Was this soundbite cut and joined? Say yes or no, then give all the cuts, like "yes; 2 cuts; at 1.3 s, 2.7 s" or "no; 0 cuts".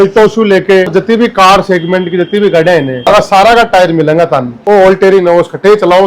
yes; 3 cuts; at 0.9 s, 3.1 s, 4.5 s